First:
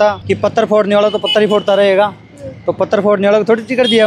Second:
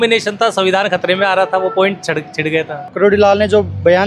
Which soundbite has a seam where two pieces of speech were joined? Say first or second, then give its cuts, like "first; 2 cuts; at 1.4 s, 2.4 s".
second; 1 cut; at 2.9 s